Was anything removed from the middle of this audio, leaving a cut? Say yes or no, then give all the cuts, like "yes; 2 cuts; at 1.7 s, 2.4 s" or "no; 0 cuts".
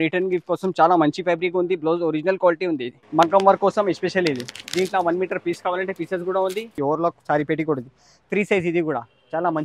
yes; 2 cuts; at 3.0 s, 6.7 s